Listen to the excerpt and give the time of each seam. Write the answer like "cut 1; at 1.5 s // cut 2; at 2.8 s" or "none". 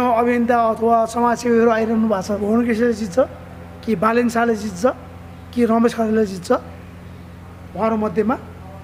cut 1; at 2.4 s